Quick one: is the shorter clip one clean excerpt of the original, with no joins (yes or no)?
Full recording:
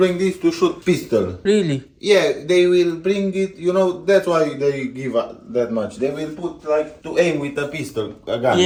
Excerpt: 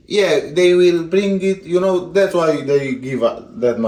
yes